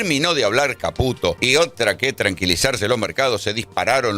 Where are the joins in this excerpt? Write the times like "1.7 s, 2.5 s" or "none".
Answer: 1.4 s